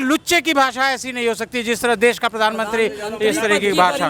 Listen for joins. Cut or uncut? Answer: uncut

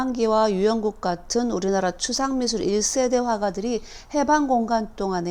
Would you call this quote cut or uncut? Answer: uncut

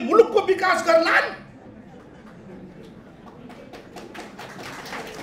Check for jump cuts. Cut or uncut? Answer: uncut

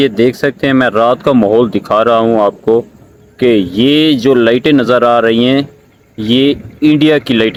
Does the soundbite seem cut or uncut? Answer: uncut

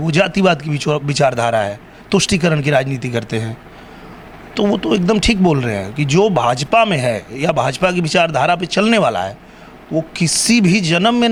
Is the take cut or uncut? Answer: uncut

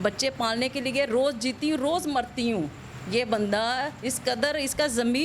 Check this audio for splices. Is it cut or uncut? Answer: uncut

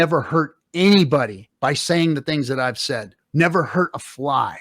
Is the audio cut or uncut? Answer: cut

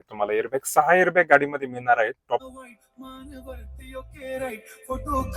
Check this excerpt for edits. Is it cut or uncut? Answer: cut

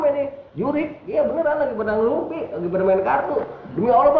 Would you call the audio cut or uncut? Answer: uncut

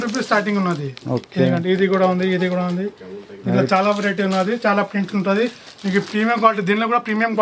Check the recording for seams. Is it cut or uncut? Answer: uncut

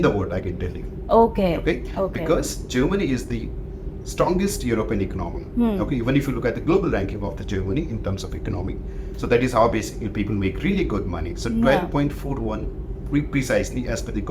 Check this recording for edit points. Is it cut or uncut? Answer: uncut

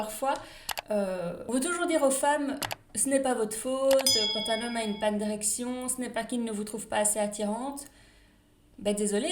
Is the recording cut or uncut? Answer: cut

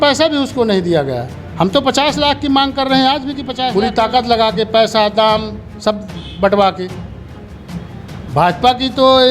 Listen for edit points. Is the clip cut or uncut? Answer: cut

